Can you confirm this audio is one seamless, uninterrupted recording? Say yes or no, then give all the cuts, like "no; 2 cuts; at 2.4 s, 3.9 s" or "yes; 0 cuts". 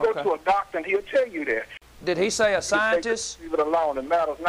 no; 1 cut; at 1.7 s